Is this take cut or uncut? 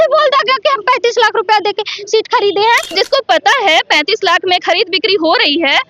cut